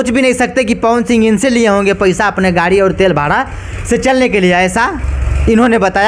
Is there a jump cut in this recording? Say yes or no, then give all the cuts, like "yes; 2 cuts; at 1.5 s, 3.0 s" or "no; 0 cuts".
no; 0 cuts